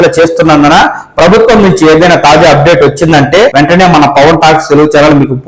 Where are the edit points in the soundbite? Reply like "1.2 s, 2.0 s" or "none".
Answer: 3.5 s